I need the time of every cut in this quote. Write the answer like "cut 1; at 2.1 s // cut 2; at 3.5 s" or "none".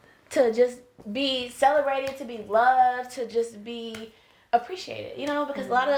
none